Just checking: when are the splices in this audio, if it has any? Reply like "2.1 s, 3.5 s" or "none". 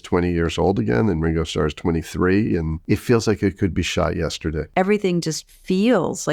2.7 s, 4.6 s